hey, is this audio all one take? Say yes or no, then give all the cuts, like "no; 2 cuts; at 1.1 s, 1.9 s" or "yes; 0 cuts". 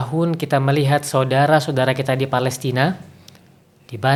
yes; 0 cuts